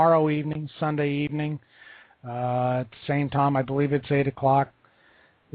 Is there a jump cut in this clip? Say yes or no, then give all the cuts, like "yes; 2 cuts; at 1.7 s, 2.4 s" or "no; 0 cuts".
yes; 1 cut; at 4.6 s